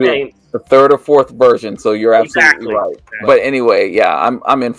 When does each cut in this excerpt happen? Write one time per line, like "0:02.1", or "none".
0:03.0